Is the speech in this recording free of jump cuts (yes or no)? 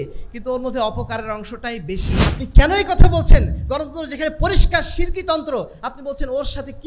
no